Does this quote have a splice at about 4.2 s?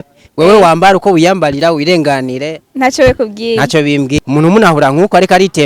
yes; 1 cut; at 4.2 s

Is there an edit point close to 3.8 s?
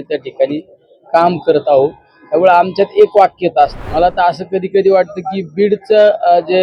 yes; 1 cut; at 3.8 s

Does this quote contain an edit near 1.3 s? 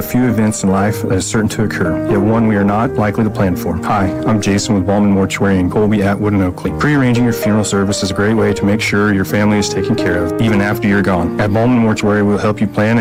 no; 0 cuts

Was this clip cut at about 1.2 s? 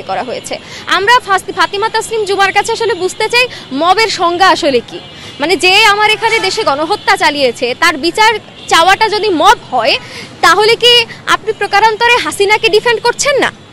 no; 0 cuts

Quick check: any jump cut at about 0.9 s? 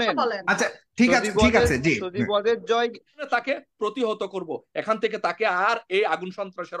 no; 1 cut; at 3.2 s

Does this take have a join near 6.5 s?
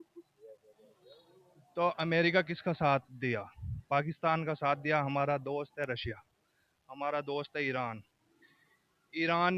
no; 0 cuts

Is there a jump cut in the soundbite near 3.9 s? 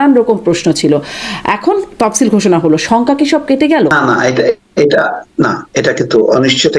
yes; 1 cut; at 3.9 s

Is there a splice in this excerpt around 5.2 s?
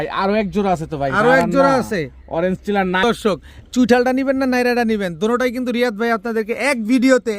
no; 1 cut; at 3.0 s

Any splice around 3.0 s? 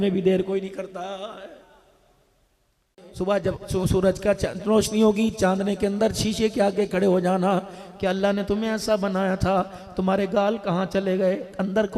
yes; 1 cut; at 3.0 s

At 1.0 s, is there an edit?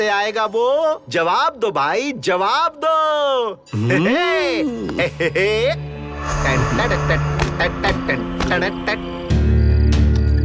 yes; 2 cuts; at 1.0 s, 9.3 s

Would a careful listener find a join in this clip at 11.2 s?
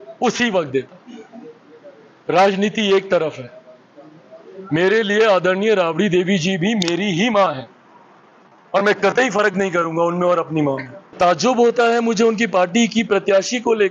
yes; 1 cut; at 11.2 s

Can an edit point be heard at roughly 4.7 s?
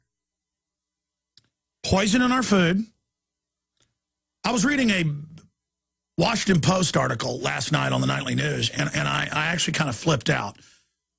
no; 0 cuts

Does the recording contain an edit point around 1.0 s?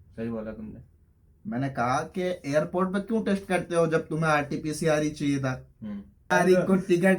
no; 1 cut; at 6.3 s

